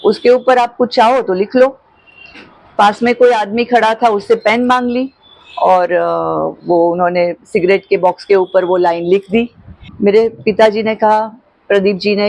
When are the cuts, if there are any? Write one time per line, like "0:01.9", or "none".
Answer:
0:09.9